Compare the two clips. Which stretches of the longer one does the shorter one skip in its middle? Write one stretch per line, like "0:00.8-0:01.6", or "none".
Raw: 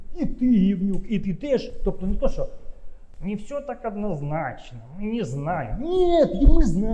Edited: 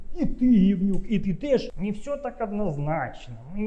0:01.7-0:03.2